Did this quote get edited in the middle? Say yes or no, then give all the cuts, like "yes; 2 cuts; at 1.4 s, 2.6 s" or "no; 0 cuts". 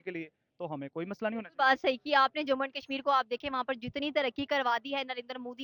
no; 0 cuts